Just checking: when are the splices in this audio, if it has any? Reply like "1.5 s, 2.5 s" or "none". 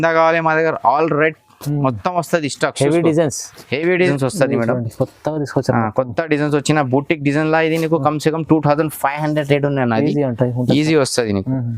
4.1 s